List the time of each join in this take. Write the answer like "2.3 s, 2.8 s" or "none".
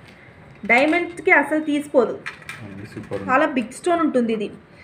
3.2 s